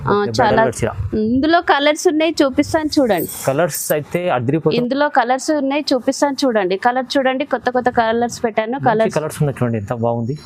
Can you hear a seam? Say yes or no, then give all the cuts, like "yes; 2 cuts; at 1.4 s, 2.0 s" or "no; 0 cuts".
yes; 1 cut; at 4.7 s